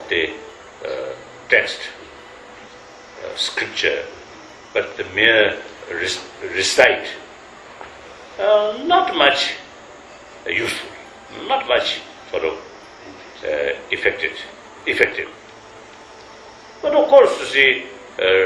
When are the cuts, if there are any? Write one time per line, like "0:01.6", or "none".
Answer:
0:02.0